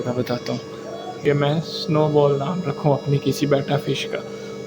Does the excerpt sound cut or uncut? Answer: cut